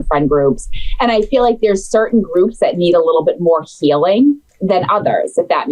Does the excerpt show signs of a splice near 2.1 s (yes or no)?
no